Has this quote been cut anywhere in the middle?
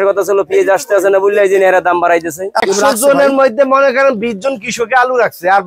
yes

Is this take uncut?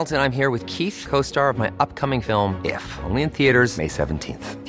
yes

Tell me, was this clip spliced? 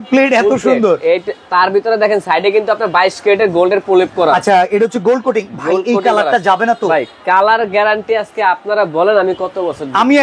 no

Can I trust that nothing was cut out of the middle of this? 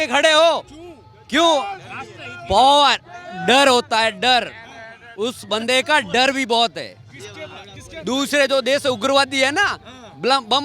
yes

